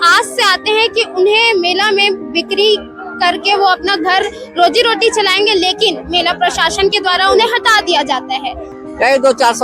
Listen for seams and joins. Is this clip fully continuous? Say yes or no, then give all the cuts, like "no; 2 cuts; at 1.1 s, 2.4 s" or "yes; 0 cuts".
no; 1 cut; at 8.7 s